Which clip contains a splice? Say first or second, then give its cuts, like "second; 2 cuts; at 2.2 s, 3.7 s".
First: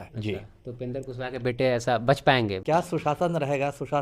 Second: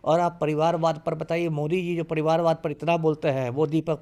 first; 1 cut; at 2.6 s